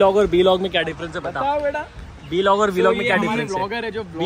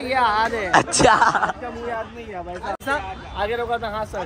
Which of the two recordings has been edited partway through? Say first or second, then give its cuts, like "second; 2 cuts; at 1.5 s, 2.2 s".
second; 1 cut; at 2.8 s